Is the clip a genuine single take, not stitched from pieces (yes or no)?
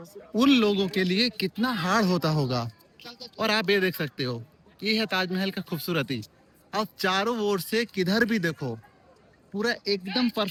yes